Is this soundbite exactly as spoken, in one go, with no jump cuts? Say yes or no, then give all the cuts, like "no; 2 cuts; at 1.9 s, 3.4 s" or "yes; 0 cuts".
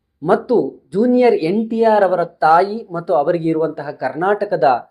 yes; 0 cuts